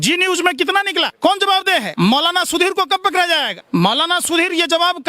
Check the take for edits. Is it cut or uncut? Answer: cut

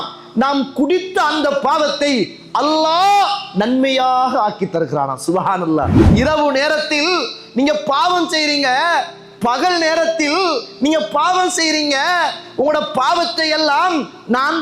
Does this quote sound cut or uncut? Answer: cut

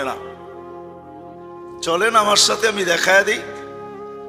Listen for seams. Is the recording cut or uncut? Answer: cut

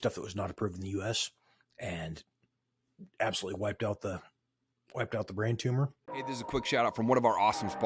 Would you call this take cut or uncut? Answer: cut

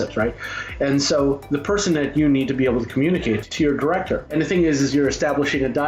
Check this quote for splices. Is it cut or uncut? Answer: cut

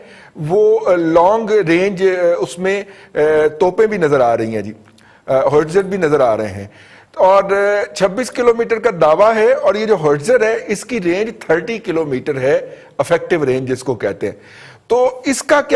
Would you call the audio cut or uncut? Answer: uncut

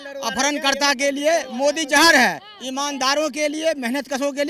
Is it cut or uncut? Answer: uncut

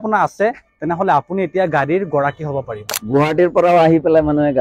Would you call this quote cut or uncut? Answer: cut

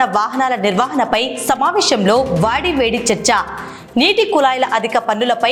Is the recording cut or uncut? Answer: uncut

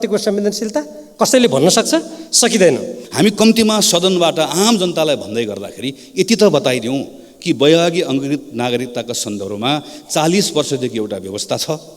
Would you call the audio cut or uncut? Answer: cut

